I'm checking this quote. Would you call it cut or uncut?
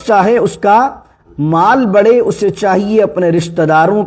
uncut